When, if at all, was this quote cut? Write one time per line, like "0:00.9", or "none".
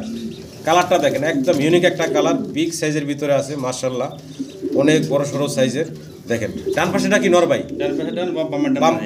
none